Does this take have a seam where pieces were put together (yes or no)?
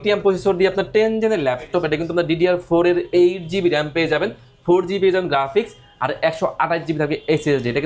no